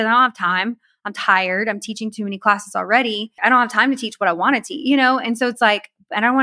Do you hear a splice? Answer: yes; 1 cut; at 3.3 s

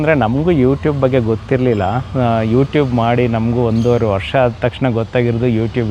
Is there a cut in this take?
no; 0 cuts

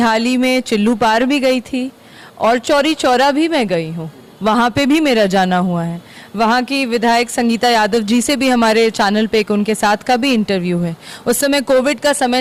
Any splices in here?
no; 0 cuts

